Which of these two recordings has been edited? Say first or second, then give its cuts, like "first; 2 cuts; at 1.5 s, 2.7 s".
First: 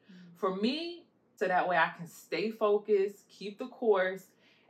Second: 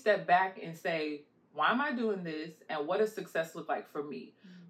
first; 1 cut; at 1.3 s